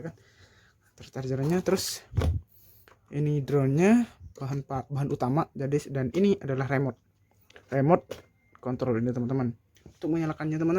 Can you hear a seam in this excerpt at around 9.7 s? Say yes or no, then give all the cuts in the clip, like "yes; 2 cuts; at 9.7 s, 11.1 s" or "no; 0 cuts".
yes; 1 cut; at 9.7 s